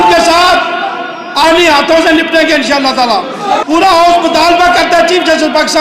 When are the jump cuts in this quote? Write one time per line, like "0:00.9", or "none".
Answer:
0:03.6